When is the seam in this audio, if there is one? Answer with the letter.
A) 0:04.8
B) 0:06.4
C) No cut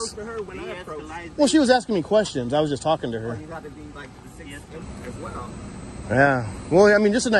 A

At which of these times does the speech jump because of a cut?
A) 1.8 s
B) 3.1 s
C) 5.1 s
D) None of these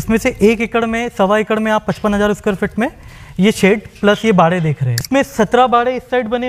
C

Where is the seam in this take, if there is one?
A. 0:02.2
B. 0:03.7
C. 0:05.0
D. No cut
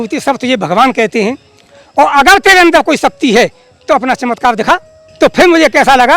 C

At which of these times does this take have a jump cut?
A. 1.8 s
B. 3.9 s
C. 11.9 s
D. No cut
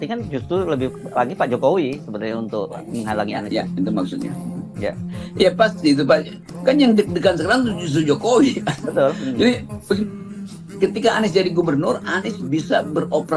D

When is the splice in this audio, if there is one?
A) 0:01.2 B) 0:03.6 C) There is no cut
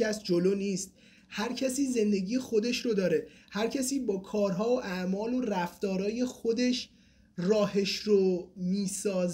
C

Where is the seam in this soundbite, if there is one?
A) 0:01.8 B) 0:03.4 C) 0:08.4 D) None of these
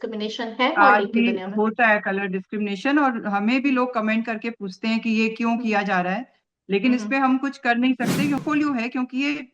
C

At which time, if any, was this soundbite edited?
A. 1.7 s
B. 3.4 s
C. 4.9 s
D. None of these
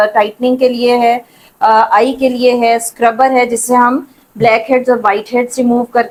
D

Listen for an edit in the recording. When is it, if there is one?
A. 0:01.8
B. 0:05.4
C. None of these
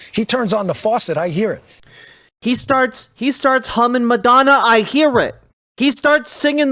C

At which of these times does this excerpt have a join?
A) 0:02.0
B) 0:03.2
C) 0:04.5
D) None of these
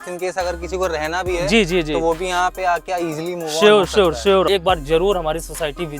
C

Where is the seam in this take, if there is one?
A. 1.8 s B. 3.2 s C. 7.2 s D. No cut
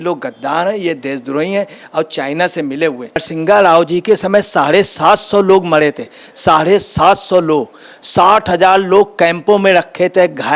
B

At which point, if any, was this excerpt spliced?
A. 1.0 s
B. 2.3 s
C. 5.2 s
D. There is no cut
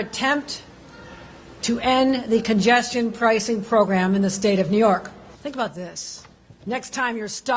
C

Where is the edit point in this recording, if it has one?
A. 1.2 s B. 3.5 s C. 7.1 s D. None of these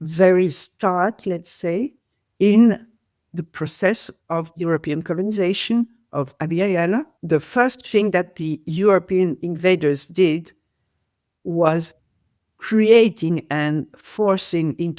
C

